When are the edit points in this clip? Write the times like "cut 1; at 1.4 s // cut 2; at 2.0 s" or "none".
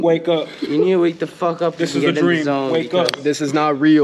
none